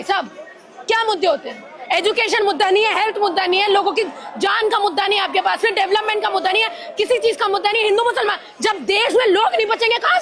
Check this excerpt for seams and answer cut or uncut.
uncut